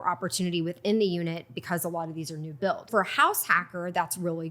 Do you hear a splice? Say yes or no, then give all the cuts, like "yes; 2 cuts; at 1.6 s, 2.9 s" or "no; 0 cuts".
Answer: yes; 1 cut; at 2.9 s